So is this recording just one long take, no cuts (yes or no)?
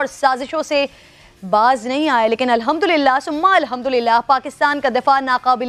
yes